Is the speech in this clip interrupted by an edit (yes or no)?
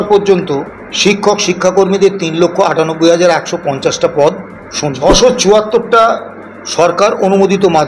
yes